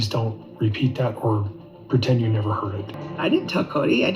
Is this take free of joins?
no; 1 cut; at 3.0 s

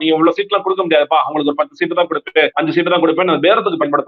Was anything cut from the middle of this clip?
yes; 1 cut; at 2.5 s

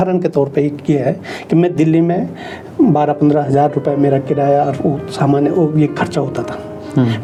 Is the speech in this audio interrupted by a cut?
no; 0 cuts

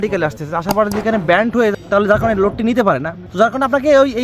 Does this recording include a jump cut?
yes; 2 cuts; at 1.7 s, 3.2 s

